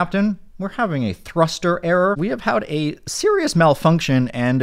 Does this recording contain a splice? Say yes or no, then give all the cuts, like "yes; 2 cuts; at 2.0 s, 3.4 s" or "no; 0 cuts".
yes; 1 cut; at 2.2 s